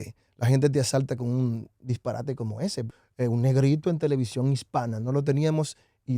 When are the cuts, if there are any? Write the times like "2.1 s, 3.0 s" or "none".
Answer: 2.8 s